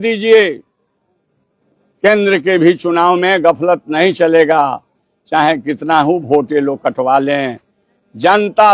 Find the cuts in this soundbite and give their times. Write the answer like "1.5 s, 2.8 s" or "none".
none